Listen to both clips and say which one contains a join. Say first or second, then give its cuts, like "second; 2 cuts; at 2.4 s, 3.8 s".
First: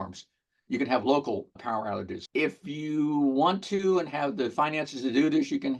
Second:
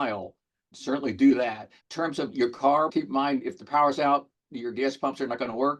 first; 1 cut; at 2.2 s